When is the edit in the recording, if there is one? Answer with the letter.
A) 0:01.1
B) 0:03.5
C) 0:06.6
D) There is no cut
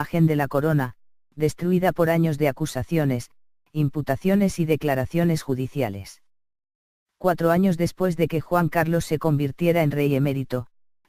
D